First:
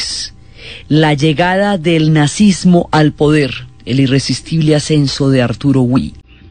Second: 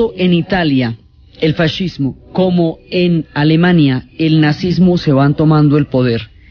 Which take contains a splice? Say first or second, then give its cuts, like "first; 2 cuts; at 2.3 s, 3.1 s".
second; 1 cut; at 3.8 s